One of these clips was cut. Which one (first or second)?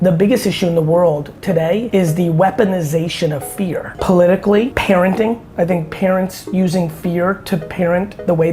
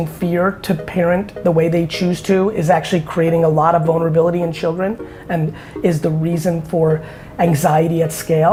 first